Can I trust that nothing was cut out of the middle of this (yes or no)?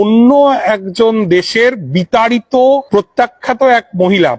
no